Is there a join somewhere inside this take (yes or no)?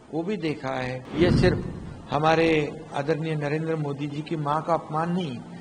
yes